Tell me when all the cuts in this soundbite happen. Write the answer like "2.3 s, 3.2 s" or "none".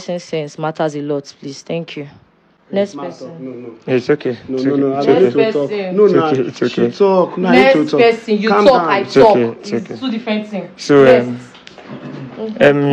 none